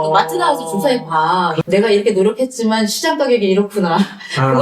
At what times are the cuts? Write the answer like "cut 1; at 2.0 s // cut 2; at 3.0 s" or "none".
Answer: cut 1; at 1.6 s